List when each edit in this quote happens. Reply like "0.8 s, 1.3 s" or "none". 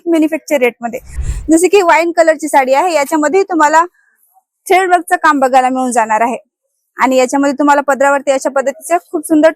1.2 s